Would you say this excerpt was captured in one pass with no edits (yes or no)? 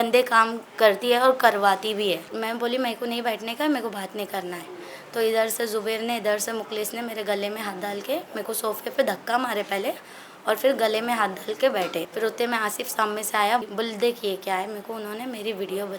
no